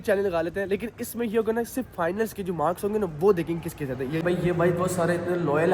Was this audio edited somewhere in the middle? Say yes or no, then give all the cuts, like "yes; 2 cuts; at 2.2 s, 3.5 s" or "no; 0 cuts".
yes; 1 cut; at 4.2 s